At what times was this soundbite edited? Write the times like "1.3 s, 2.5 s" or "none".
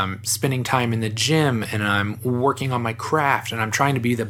none